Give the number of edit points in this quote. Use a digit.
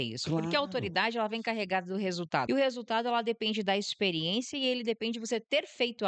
1